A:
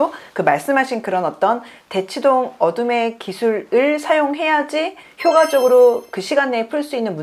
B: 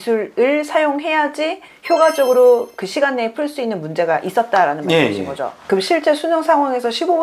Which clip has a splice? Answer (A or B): B